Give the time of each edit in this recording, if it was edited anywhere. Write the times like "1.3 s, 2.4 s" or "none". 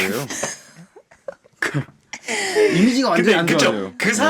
2.1 s